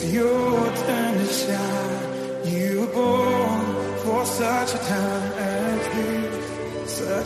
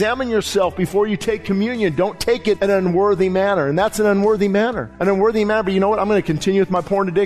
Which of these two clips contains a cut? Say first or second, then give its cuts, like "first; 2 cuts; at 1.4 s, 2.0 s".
second; 2 cuts; at 2.6 s, 4.9 s